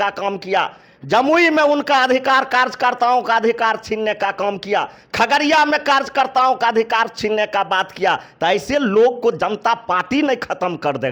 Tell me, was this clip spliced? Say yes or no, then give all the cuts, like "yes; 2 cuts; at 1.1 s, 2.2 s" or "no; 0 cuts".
no; 0 cuts